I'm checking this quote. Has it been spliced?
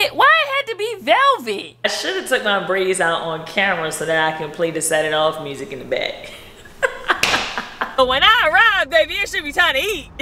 yes; 2 cuts; at 1.8 s, 8.0 s

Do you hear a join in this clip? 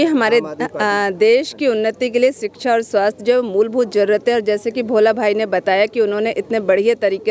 no; 0 cuts

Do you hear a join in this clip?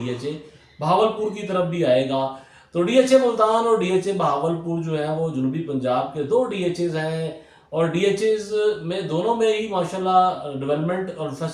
no; 0 cuts

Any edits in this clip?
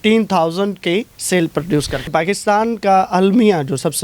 yes; 2 cuts; at 1.2 s, 2.1 s

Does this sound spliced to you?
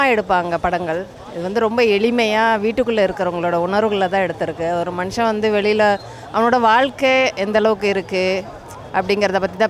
no; 0 cuts

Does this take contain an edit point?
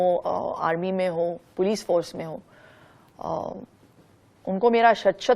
no; 0 cuts

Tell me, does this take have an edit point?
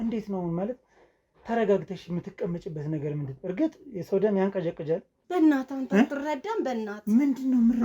yes; 1 cut; at 5.1 s

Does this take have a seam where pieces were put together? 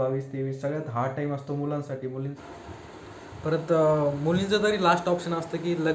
yes; 1 cut; at 2.2 s

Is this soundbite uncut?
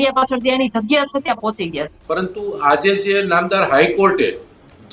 no; 1 cut; at 1.9 s

